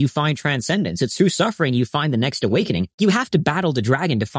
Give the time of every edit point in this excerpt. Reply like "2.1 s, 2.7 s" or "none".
2.9 s